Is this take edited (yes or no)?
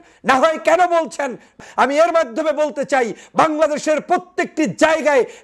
yes